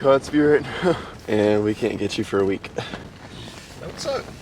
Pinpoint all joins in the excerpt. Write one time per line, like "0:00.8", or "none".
0:01.1
0:03.1